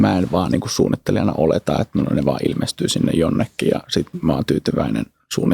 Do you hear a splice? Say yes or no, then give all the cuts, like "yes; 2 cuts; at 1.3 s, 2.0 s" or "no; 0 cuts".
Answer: no; 0 cuts